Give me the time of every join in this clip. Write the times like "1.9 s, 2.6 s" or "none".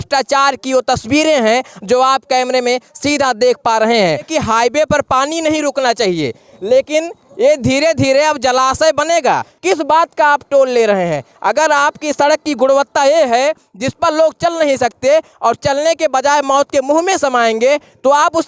4.3 s, 9.6 s